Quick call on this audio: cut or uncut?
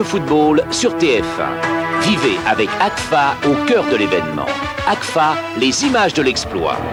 uncut